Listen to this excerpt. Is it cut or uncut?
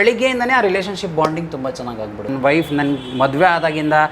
cut